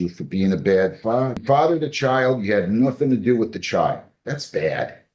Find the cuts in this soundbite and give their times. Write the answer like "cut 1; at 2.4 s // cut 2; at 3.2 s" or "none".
cut 1; at 1.4 s